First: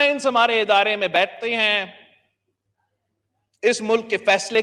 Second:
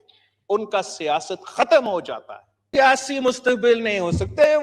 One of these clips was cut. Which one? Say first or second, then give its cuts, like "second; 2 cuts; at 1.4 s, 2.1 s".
second; 1 cut; at 2.7 s